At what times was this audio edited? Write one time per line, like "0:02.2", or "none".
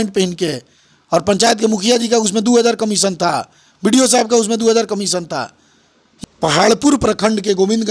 0:06.0